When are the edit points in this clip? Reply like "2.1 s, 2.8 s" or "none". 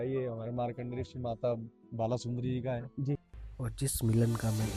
3.4 s

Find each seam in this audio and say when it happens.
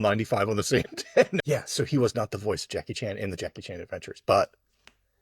1.4 s

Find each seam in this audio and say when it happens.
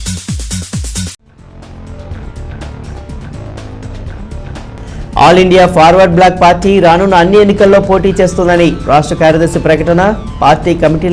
1.4 s, 4.0 s, 5.0 s

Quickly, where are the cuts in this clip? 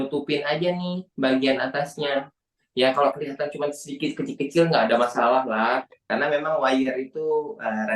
6.0 s

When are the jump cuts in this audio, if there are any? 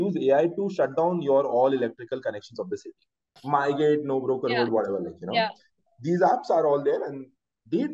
3.4 s

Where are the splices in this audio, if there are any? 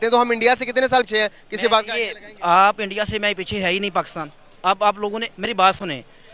1.1 s

